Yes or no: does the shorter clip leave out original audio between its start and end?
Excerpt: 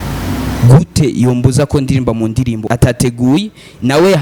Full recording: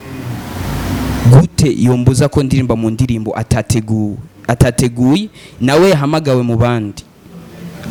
yes